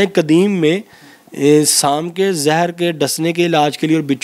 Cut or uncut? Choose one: uncut